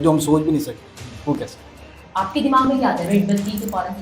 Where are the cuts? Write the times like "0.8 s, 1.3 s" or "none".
2.0 s